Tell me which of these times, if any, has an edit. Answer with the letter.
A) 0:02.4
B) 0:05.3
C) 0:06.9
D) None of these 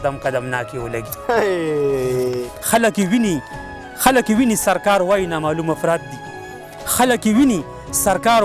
A